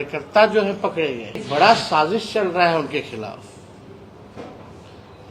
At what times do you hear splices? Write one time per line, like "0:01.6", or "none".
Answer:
0:01.4